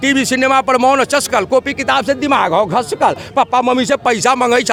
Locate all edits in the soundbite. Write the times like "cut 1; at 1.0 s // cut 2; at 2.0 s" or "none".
none